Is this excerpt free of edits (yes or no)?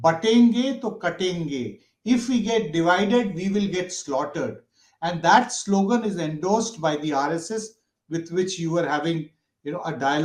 yes